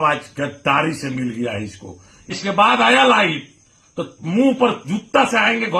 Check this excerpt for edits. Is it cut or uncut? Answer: cut